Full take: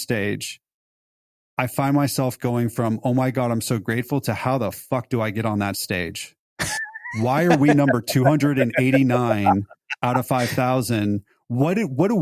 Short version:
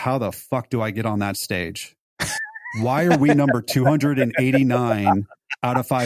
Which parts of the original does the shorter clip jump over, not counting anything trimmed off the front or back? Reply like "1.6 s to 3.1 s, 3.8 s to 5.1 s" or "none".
none